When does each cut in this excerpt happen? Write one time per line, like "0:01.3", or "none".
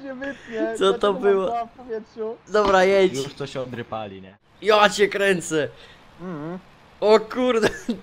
0:04.4